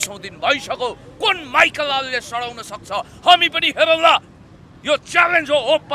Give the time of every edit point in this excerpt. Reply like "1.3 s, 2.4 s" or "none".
none